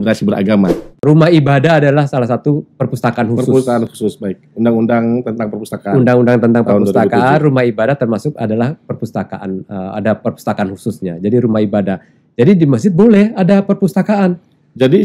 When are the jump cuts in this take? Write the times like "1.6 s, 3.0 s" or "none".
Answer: 1.0 s